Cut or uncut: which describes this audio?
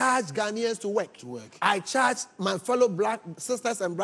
uncut